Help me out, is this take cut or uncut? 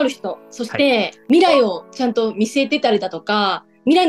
cut